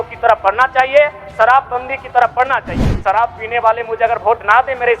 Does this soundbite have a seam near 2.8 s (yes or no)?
yes